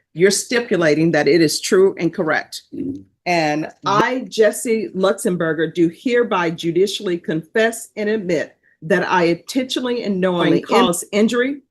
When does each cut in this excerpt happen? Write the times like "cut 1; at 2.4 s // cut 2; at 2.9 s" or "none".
cut 1; at 3.8 s // cut 2; at 10.7 s